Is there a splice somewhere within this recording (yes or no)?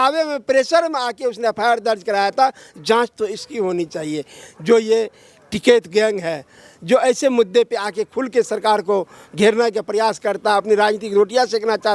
no